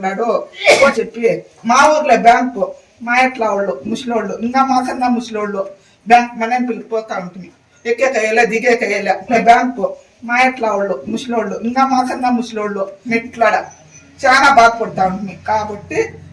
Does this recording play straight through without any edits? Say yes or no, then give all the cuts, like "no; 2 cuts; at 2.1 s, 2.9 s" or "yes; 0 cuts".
no; 3 cuts; at 0.9 s, 9.3 s, 13.0 s